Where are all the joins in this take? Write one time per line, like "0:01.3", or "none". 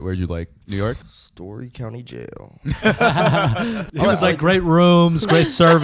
0:01.2
0:03.8